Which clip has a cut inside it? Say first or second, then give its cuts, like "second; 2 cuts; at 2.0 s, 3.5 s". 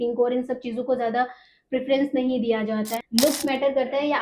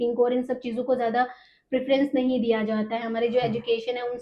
first; 1 cut; at 3.0 s